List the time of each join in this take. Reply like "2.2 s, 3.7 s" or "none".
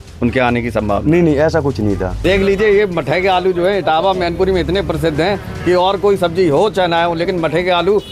2.2 s

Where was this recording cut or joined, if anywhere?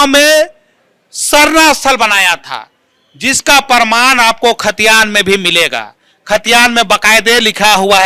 none

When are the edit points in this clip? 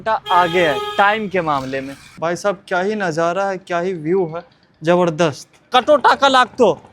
2.2 s, 5.7 s

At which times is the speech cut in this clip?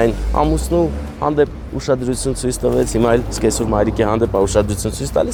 none

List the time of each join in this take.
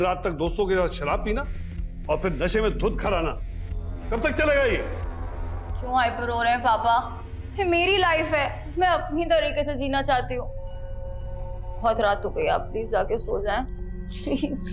none

